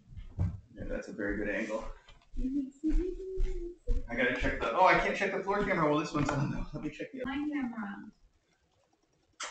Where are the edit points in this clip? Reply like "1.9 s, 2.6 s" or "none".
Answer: 7.2 s